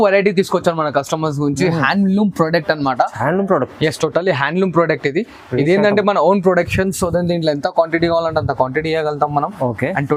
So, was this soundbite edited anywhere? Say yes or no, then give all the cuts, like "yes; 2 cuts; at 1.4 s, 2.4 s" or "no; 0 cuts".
no; 0 cuts